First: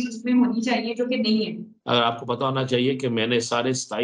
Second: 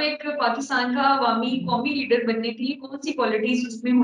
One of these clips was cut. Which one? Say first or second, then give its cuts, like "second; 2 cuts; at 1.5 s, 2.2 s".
first; 1 cut; at 1.7 s